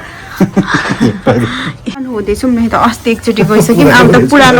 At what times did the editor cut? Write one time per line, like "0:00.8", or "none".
0:02.1

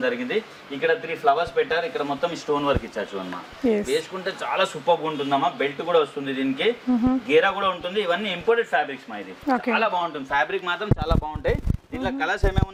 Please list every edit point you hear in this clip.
none

